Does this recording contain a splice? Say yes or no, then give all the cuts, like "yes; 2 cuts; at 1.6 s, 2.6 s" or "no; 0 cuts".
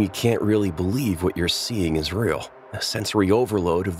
no; 0 cuts